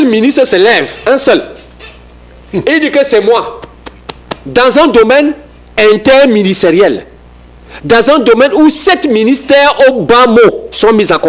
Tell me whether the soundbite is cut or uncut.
uncut